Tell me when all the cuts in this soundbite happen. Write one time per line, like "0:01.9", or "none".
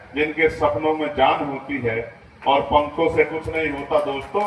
none